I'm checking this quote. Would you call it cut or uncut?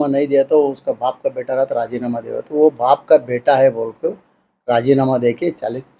uncut